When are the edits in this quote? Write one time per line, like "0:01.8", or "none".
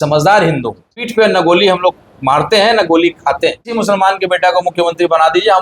0:01.1
0:03.7